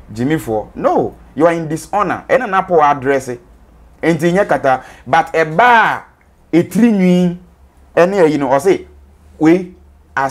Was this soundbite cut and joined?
no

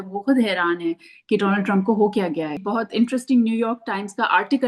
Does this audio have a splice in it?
yes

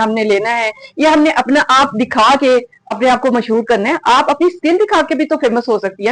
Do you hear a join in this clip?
no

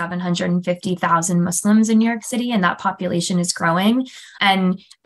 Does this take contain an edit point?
no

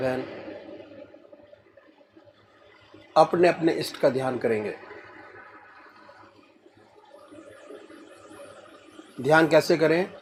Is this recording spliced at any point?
no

